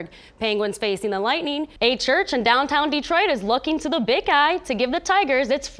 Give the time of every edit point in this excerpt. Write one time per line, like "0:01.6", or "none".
0:01.7